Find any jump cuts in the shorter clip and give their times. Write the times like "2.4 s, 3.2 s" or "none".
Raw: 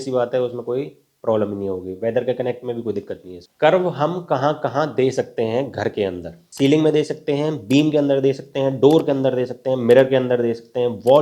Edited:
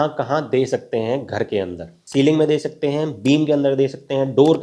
none

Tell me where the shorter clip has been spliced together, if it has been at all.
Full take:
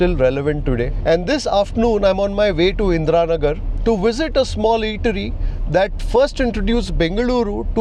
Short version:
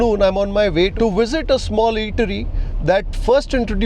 0.9 s

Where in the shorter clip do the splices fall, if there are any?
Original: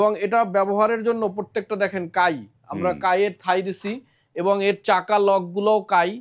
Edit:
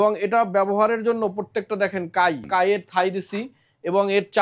2.5 s

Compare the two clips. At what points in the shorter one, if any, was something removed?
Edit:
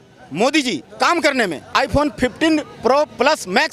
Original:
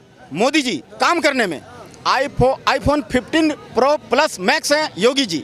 1.7 s

